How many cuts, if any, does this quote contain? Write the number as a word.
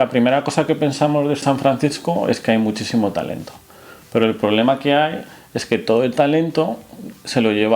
one